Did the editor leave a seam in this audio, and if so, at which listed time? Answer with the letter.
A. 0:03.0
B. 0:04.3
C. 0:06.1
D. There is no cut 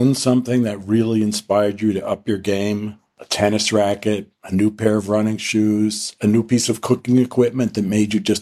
D